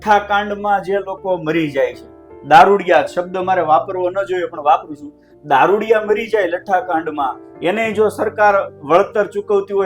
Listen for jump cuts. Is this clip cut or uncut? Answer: uncut